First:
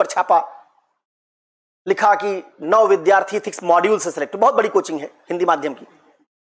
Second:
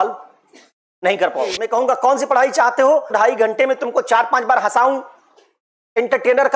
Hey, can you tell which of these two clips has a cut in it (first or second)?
second